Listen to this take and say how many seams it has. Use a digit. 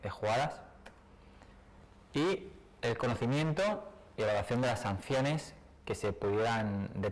1